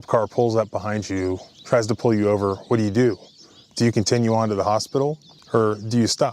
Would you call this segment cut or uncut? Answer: cut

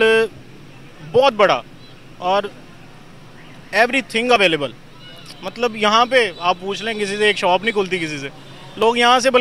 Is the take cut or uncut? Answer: uncut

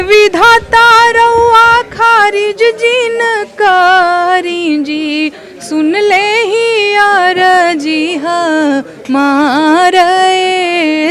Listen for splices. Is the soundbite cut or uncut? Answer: uncut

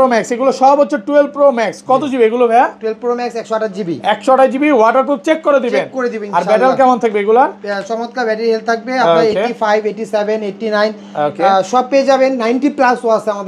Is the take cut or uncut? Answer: uncut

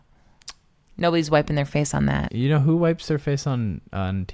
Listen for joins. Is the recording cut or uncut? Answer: cut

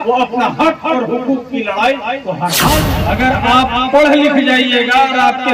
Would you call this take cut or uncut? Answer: cut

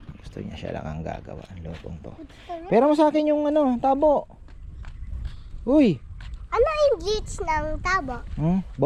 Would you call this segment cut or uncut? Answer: uncut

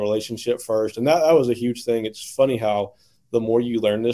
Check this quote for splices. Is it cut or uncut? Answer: uncut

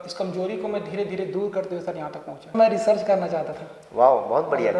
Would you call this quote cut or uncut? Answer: cut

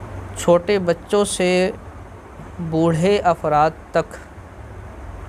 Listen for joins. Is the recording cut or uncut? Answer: uncut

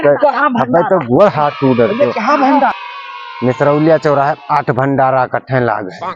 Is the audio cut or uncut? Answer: cut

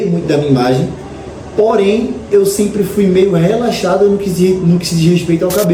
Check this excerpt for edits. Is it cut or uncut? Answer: uncut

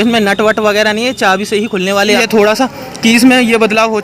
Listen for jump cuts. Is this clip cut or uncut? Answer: cut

